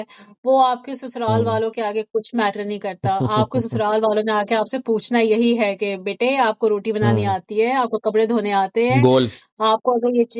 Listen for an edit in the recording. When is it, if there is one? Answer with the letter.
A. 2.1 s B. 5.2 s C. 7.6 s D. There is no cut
D